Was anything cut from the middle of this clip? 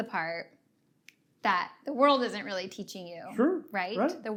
no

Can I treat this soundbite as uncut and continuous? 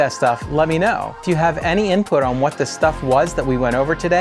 no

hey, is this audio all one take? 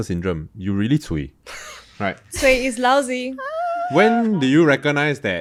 yes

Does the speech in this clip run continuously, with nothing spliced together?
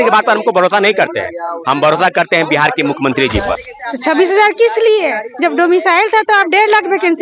no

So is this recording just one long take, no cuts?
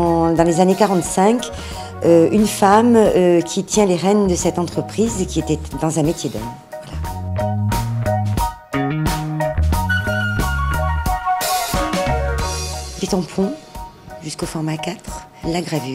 no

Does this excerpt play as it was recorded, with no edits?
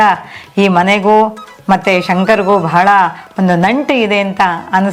yes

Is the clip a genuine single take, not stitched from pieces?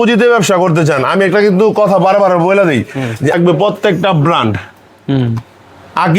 no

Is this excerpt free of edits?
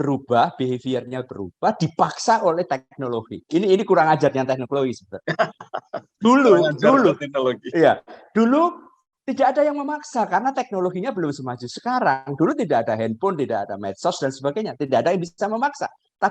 yes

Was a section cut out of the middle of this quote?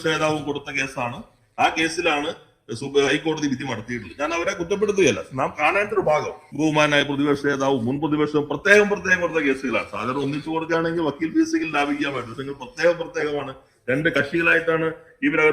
yes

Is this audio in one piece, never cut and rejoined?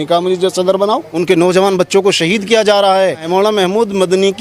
no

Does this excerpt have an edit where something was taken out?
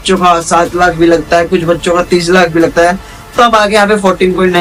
no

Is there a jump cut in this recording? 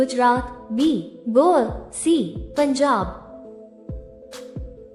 no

